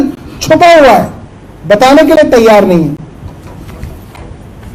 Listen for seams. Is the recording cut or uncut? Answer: uncut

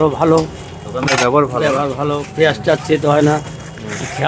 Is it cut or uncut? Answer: uncut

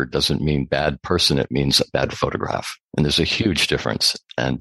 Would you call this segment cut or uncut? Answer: uncut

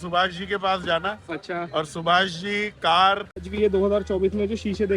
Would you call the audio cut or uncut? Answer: cut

